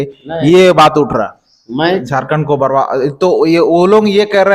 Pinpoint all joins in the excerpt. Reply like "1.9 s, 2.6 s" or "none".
2.0 s